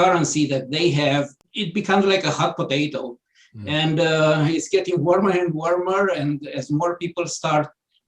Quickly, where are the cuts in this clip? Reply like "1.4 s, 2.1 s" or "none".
1.4 s